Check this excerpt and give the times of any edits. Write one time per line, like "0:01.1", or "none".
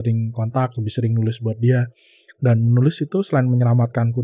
none